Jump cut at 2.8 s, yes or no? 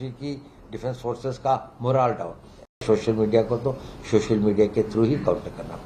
yes